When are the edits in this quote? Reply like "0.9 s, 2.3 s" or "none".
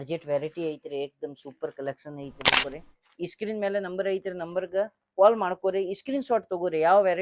2.6 s